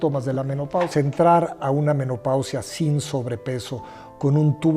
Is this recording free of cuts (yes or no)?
no